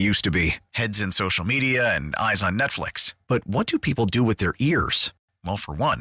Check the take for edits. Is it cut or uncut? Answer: uncut